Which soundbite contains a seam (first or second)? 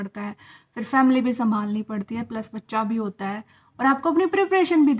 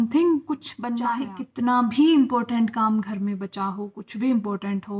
second